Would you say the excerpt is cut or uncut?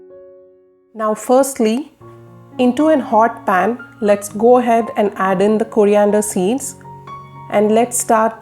cut